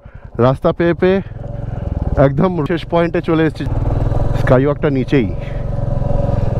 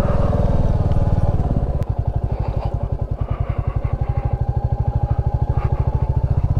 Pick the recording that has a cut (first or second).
second